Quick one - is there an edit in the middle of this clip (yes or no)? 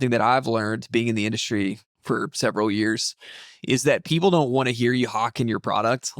yes